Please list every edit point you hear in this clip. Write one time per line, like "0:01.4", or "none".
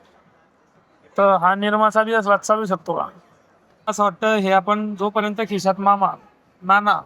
0:03.9